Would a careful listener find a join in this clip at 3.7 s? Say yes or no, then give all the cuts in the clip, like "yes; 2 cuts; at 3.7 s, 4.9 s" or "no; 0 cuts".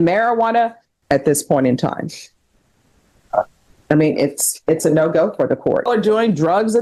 no; 2 cuts; at 0.9 s, 5.9 s